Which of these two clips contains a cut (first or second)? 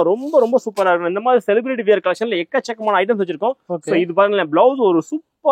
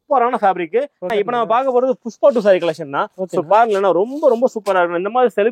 second